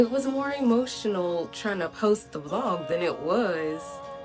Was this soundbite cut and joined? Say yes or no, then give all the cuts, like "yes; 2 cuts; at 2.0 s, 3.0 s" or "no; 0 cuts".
no; 0 cuts